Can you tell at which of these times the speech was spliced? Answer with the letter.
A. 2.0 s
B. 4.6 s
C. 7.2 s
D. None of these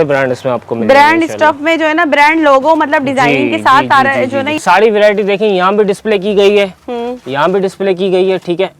B